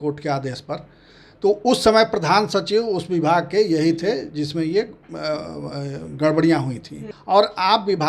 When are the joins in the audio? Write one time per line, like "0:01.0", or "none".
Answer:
0:07.1